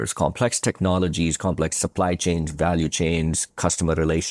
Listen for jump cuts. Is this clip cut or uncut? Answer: uncut